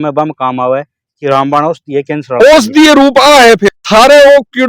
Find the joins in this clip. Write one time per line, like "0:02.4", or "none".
0:03.7

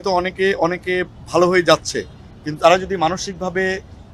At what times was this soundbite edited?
none

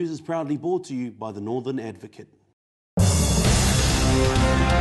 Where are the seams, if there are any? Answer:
0:02.6

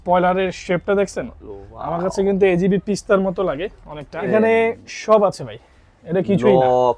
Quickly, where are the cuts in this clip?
0:04.3

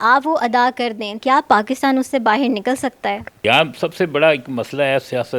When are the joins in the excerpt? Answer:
0:01.2
0:03.3

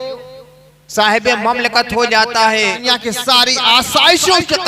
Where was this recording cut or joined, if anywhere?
0:02.8

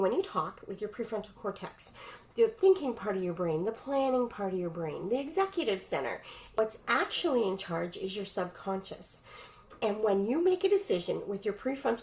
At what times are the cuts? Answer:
0:06.4

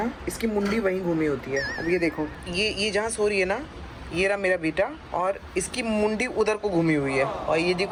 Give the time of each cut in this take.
none

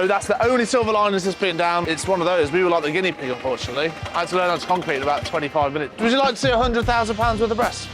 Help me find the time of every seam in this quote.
0:01.9
0:04.0
0:05.9

